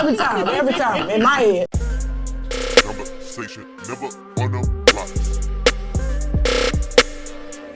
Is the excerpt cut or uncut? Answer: cut